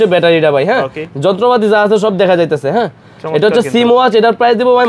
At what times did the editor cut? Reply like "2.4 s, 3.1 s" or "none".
none